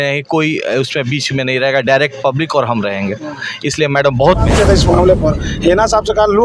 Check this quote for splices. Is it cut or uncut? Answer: cut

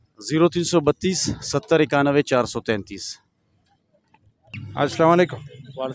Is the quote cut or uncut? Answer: uncut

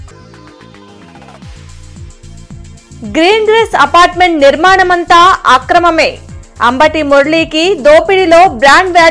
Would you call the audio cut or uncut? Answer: cut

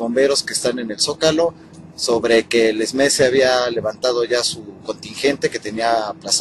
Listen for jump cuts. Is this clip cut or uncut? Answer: uncut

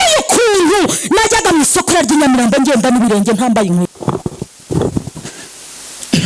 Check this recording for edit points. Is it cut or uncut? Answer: cut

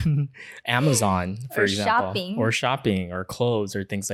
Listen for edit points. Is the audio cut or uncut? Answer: uncut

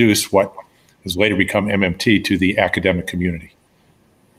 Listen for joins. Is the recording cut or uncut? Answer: uncut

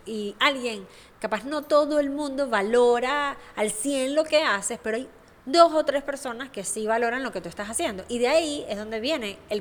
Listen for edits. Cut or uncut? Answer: uncut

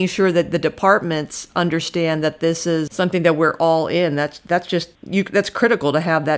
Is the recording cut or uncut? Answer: cut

